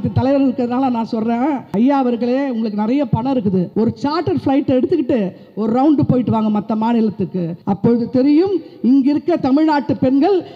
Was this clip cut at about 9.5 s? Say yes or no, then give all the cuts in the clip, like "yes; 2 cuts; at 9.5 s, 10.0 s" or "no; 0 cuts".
no; 3 cuts; at 1.6 s, 3.7 s, 7.5 s